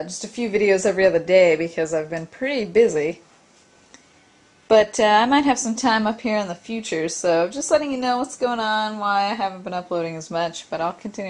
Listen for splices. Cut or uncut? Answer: cut